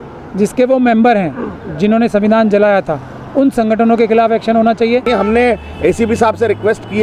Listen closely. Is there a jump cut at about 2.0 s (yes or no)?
no